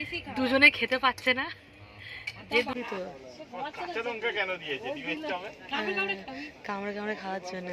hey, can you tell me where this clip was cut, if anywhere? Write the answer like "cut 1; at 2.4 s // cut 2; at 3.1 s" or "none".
cut 1; at 2.7 s

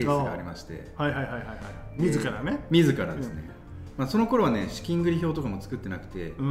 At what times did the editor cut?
none

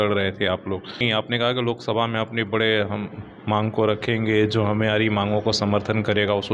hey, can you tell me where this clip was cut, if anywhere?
cut 1; at 1.0 s

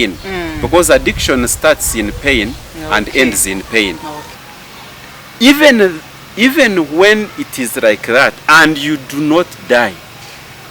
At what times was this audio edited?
cut 1; at 4.4 s

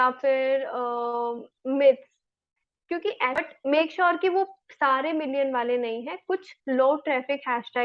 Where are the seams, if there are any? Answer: cut 1; at 3.4 s

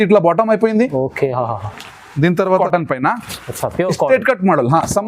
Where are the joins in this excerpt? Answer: cut 1; at 2.6 s

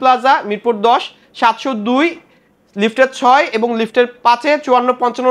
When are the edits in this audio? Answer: none

